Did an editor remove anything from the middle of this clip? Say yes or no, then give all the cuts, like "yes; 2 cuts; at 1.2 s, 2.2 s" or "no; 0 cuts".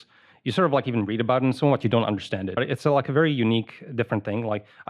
yes; 1 cut; at 2.6 s